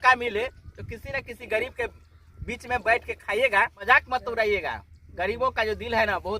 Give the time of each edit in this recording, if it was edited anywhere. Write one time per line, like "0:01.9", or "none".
0:03.8